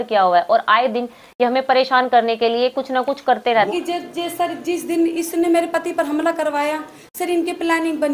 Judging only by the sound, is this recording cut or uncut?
cut